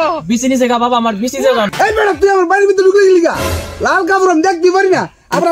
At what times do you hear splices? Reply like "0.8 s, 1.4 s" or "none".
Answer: 1.7 s